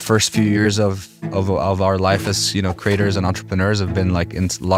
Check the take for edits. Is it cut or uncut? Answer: uncut